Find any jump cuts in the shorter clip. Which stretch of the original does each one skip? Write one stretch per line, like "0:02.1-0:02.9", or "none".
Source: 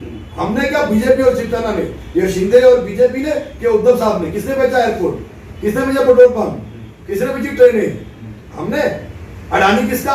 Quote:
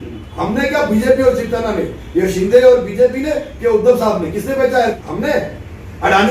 0:05.0-0:08.5